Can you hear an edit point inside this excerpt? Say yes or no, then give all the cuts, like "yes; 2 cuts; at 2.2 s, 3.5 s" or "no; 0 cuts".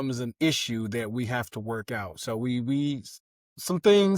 no; 0 cuts